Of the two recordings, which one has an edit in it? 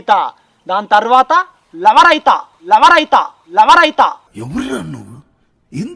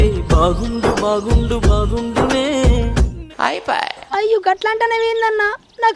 second; 1 cut; at 3.9 s

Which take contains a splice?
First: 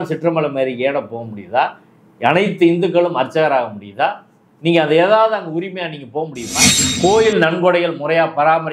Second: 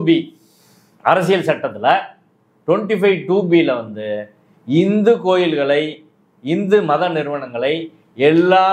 first; 1 cut; at 6.8 s

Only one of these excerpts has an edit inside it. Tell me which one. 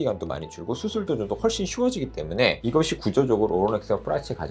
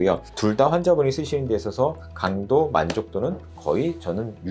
first; 1 cut; at 2.6 s

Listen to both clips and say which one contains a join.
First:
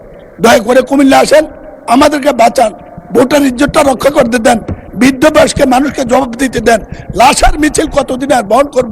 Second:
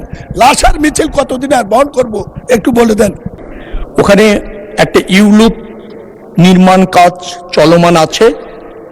second; 1 cut; at 3.3 s

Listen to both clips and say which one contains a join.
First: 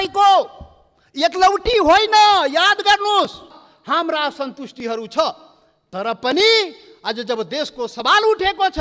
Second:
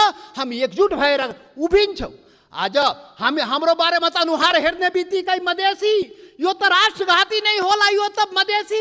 first; 1 cut; at 3.6 s

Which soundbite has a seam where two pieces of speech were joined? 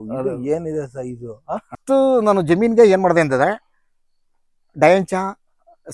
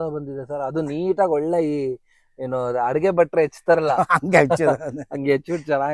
first; 1 cut; at 1.8 s

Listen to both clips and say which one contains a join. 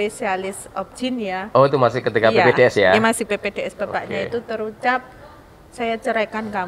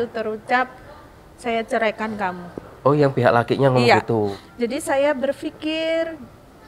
second; 1 cut; at 4.4 s

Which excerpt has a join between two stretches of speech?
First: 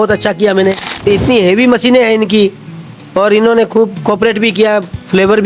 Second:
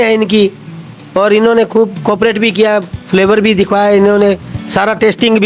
first; 1 cut; at 1.0 s

